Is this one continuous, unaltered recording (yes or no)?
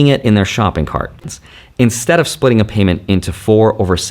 no